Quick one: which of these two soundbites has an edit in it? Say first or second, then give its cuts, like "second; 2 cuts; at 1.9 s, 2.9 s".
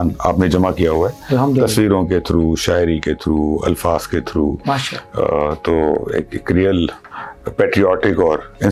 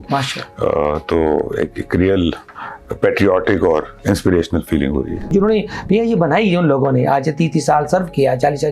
second; 1 cut; at 5.3 s